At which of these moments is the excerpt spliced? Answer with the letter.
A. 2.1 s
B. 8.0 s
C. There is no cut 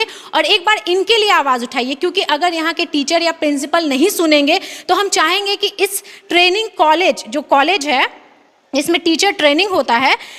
C